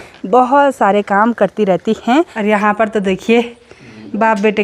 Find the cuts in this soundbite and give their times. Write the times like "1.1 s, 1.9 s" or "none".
2.3 s